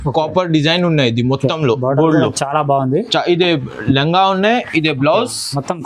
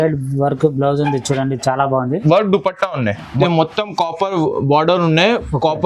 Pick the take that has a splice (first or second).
second